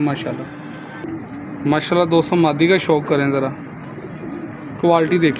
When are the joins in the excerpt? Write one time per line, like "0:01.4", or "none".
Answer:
0:01.3